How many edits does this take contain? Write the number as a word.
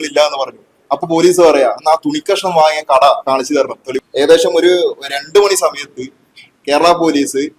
one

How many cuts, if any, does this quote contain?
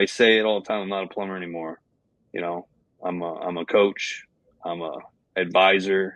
zero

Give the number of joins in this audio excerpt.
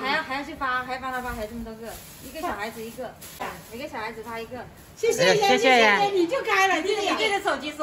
one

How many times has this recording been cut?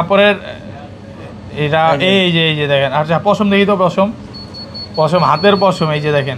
zero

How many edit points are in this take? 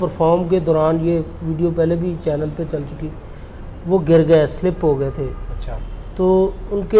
zero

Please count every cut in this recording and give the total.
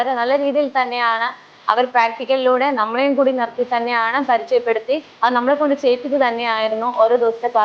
zero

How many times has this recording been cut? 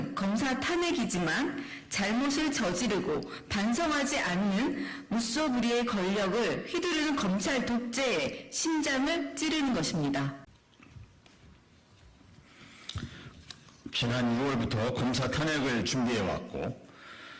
one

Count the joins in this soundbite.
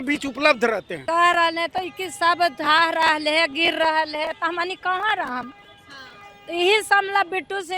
one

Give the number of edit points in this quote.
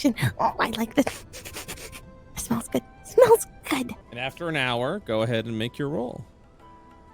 one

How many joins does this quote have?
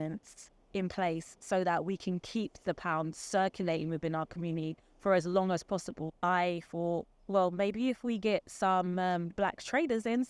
one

